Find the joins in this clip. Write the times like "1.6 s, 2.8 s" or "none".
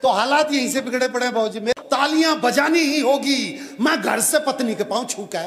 1.8 s